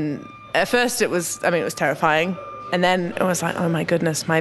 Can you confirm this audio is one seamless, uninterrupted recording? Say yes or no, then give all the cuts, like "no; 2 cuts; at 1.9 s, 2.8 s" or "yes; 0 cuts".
yes; 0 cuts